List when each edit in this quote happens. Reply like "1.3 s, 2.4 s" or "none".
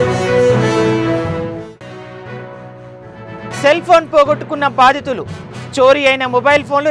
3.3 s